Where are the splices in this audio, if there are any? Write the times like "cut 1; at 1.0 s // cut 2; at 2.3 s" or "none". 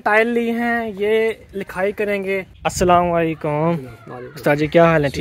cut 1; at 2.5 s